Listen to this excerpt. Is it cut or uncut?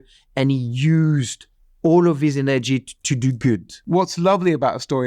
cut